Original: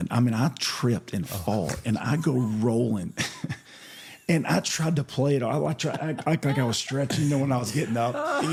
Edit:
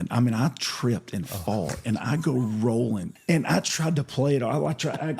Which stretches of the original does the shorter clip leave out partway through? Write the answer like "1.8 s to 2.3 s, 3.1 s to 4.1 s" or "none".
3.1 s to 4.1 s